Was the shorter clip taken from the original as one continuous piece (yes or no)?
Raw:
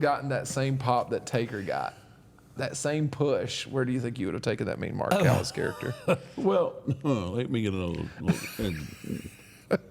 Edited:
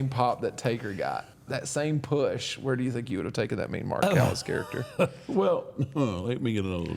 no